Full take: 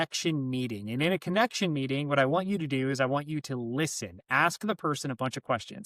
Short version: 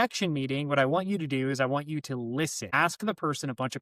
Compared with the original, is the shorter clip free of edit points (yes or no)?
no